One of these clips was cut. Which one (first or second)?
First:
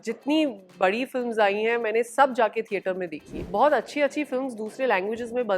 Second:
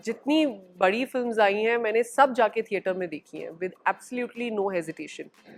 first